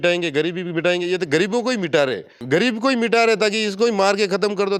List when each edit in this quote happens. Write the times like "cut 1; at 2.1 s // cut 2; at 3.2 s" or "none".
cut 1; at 2.3 s

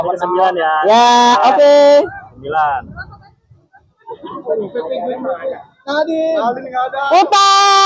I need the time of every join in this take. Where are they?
none

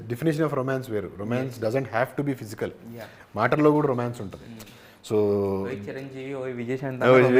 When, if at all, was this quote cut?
none

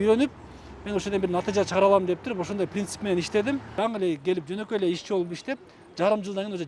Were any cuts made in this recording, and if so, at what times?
cut 1; at 3.7 s

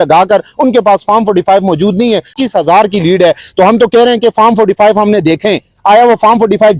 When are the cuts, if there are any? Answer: cut 1; at 2.3 s

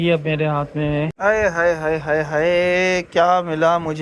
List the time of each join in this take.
cut 1; at 1.1 s

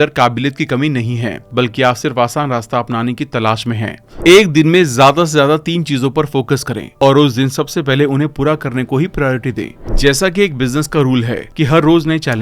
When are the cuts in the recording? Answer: cut 1; at 4.1 s // cut 2; at 9.8 s

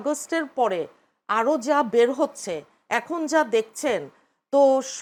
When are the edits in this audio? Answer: none

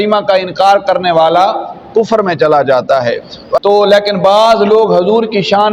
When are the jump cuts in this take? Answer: cut 1; at 3.6 s

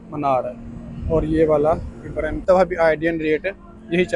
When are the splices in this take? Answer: cut 1; at 2.4 s

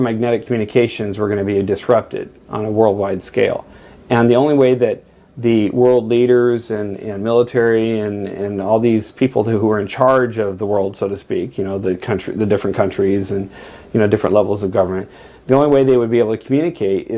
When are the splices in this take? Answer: none

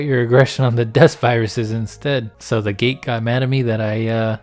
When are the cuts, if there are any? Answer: cut 1; at 2.3 s

